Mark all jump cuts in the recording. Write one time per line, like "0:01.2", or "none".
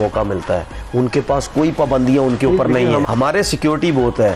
0:03.0

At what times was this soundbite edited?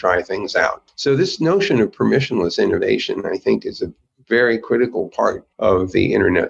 0:00.9
0:05.5

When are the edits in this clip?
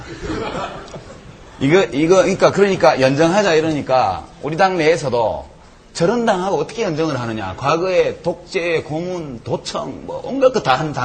0:10.0

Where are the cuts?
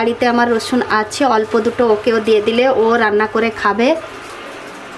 none

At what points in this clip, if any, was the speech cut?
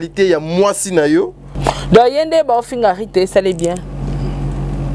0:01.5

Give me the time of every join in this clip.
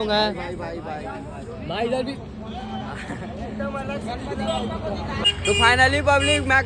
0:05.2

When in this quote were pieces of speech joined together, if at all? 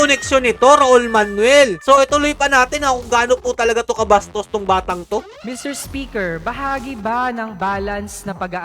0:01.8
0:05.3

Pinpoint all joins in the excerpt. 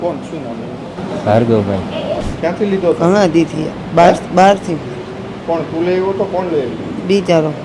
0:02.3

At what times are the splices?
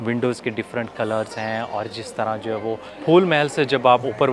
0:03.0

